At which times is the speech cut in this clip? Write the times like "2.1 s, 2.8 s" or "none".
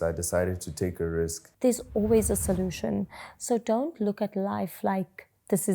1.4 s